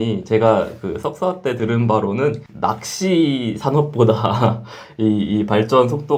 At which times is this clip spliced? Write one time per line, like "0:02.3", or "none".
none